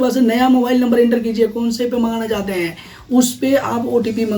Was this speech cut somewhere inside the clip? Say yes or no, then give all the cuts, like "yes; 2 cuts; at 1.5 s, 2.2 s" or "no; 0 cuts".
no; 0 cuts